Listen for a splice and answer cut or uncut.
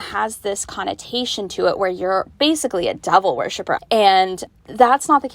cut